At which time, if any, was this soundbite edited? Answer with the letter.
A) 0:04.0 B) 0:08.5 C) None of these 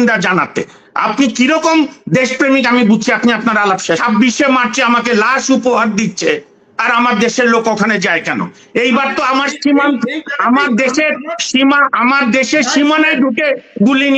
A